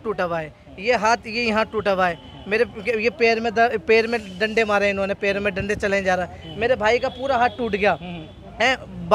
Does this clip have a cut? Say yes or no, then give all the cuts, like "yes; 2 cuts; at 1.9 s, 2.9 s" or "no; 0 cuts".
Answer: no; 0 cuts